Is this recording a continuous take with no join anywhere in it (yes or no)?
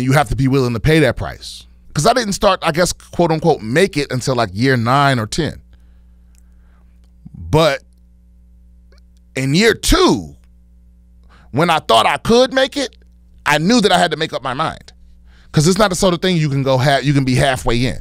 no